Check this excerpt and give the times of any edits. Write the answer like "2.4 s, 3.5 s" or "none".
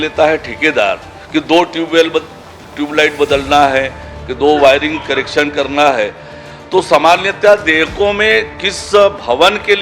none